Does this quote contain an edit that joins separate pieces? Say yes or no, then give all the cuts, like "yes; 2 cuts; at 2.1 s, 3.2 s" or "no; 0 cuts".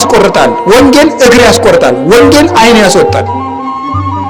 no; 0 cuts